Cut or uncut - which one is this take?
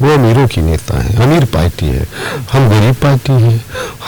uncut